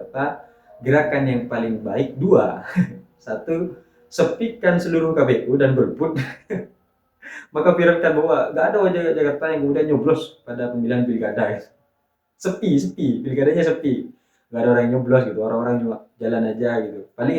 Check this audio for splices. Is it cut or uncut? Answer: uncut